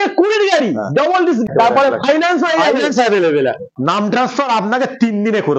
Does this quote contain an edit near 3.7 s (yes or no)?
yes